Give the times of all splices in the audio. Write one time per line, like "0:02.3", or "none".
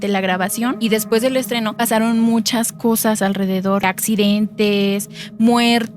0:00.8
0:01.7
0:03.8